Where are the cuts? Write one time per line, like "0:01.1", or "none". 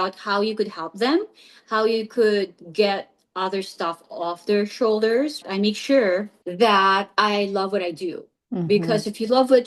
0:05.4
0:06.4